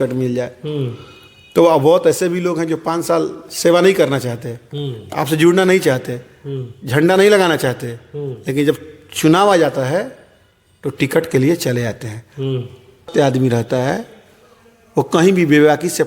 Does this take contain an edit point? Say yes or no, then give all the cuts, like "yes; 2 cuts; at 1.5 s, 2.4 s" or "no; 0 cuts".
yes; 1 cut; at 13.1 s